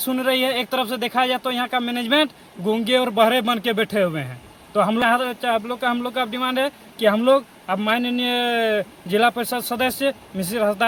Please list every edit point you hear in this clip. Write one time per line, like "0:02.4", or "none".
none